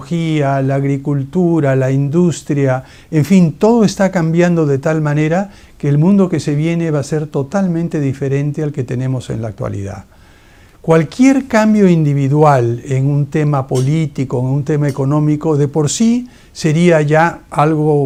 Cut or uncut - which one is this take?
uncut